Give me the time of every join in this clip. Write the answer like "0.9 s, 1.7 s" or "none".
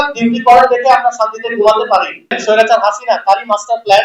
2.4 s